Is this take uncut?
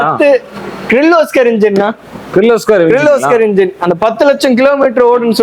yes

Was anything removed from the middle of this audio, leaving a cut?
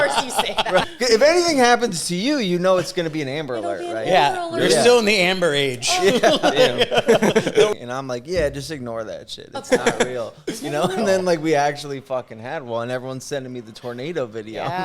yes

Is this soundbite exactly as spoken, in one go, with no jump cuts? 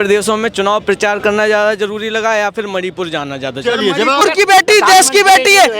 no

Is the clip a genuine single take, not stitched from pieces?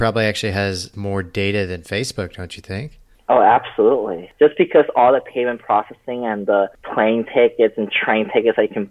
no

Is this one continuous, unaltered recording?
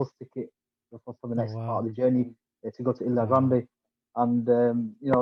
yes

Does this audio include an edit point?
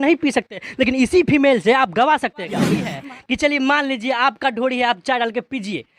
yes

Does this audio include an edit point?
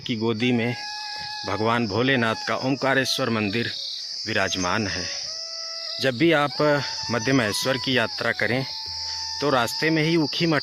no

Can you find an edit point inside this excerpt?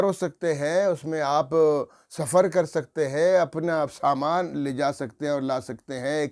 no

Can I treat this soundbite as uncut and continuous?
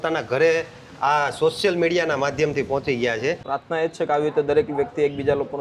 no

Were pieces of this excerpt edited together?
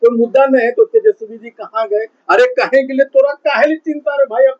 no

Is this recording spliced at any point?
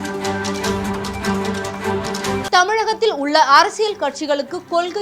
yes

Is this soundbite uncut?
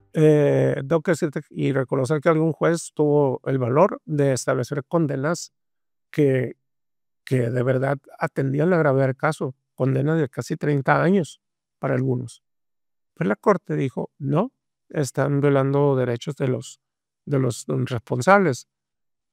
yes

